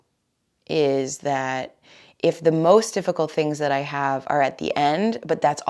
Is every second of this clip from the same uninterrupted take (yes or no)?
yes